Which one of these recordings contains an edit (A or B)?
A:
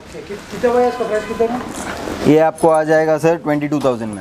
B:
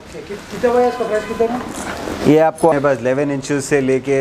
B